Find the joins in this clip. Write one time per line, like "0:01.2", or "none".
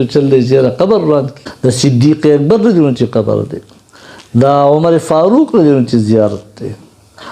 0:01.4